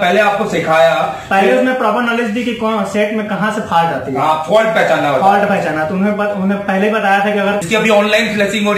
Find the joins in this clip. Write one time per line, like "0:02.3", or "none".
0:07.6

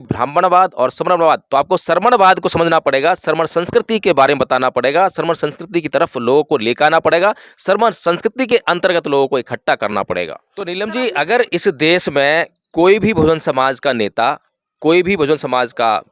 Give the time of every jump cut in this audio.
0:10.7

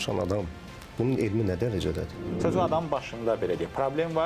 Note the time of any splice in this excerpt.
0:02.3

